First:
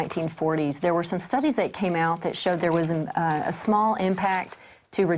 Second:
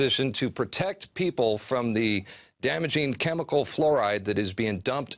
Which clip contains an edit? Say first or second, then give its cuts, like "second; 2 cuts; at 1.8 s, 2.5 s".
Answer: second; 1 cut; at 3.7 s